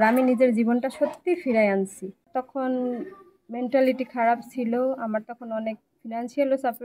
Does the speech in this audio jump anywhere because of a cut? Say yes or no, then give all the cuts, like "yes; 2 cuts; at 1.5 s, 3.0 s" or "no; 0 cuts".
yes; 1 cut; at 2.4 s